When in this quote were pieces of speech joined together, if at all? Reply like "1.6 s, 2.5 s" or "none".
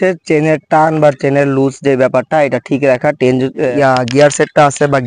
3.7 s